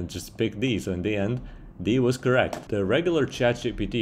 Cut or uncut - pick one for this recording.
cut